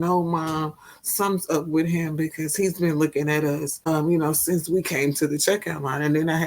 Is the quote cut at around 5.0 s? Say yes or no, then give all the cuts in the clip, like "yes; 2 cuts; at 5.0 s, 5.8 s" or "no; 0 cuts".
no; 1 cut; at 3.7 s